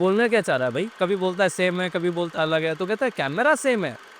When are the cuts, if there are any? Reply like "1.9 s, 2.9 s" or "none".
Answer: 0.9 s